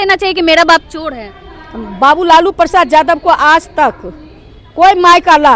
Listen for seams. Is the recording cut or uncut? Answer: uncut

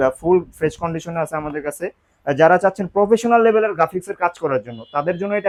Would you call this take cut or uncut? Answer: uncut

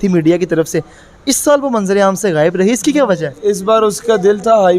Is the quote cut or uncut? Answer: uncut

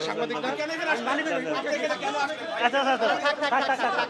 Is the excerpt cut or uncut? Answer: uncut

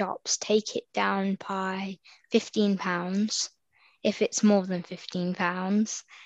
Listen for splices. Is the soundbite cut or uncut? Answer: uncut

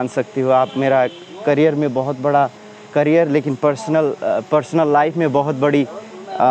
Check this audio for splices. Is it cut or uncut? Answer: uncut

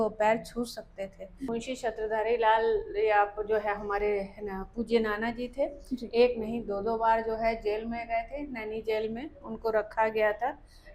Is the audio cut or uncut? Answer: cut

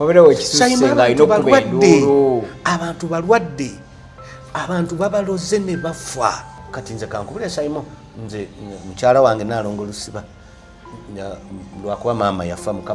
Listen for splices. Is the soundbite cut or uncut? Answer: cut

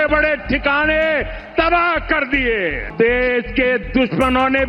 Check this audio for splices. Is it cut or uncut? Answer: cut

